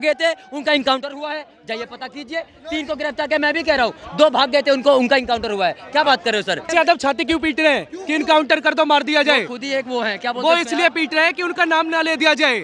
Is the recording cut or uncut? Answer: cut